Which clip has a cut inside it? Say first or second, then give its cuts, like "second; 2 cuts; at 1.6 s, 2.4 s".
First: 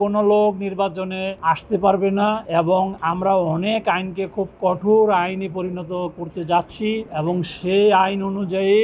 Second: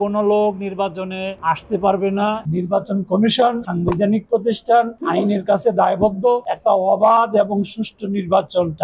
second; 2 cuts; at 2.4 s, 6.5 s